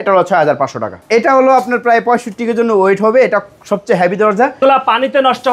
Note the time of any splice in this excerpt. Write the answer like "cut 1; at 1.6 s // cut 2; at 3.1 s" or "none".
cut 1; at 1.0 s // cut 2; at 4.6 s

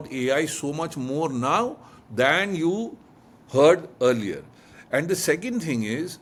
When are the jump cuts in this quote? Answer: none

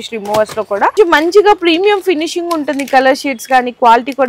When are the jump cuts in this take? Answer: cut 1; at 0.9 s

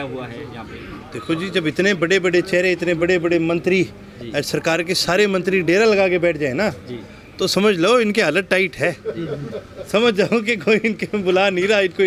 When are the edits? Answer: none

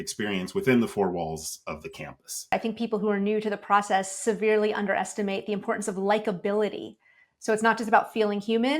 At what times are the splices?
cut 1; at 2.5 s

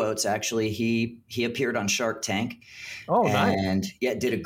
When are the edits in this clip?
none

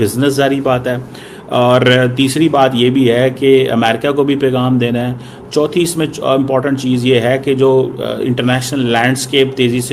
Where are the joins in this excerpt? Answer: none

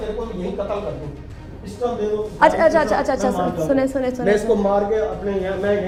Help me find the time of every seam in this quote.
none

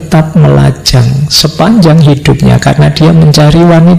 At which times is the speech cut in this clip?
none

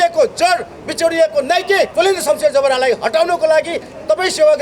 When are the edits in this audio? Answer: cut 1; at 1.9 s

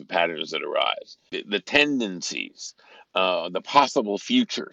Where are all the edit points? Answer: cut 1; at 1.4 s

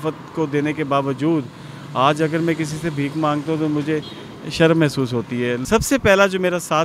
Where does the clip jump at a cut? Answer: cut 1; at 5.6 s

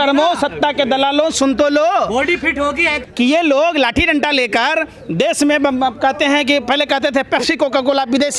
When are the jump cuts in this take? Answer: cut 1; at 3.0 s

